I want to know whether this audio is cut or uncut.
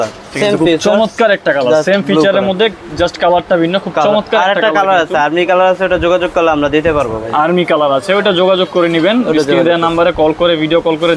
uncut